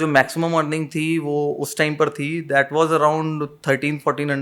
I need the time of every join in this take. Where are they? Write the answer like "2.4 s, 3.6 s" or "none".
none